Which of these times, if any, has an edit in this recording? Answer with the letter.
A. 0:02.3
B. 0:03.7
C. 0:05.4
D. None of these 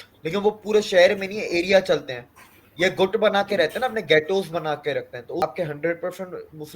C